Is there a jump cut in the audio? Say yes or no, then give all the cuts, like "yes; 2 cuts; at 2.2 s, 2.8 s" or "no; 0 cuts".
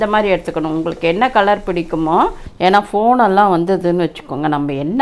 yes; 1 cut; at 2.4 s